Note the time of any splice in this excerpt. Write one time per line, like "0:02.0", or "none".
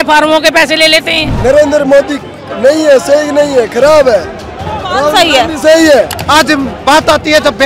0:01.3
0:06.2